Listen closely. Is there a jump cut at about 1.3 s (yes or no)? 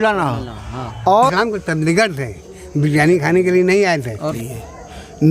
yes